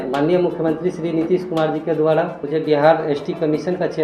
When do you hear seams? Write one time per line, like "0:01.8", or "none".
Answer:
0:02.4